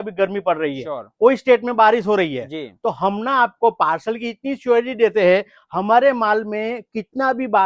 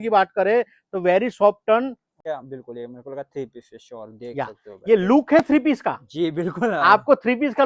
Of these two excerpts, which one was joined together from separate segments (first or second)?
second